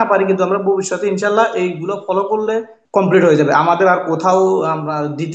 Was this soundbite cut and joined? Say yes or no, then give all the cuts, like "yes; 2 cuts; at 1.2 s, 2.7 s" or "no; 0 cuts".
yes; 1 cut; at 2.7 s